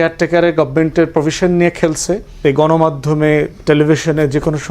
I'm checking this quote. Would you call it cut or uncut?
cut